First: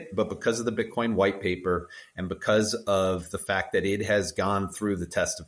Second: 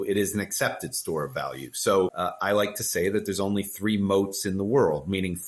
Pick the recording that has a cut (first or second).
second